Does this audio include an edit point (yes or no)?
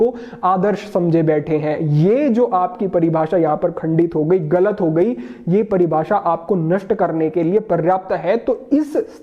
no